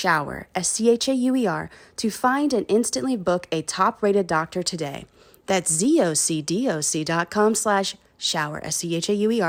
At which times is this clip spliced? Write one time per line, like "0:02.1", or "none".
none